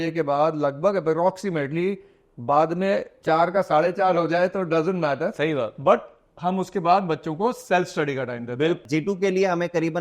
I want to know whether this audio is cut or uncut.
cut